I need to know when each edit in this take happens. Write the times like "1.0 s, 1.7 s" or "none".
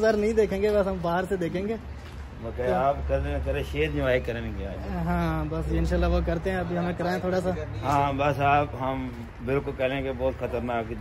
none